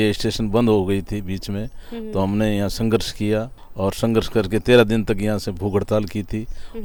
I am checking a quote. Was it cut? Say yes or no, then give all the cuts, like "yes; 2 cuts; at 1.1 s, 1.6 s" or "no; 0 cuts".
no; 0 cuts